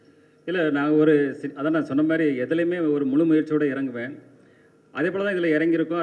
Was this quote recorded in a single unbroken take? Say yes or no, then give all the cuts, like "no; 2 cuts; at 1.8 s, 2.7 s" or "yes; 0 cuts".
yes; 0 cuts